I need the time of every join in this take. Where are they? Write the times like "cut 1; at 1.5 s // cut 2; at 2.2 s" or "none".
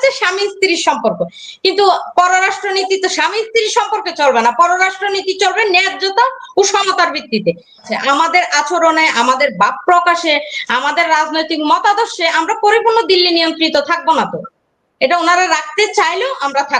cut 1; at 7.9 s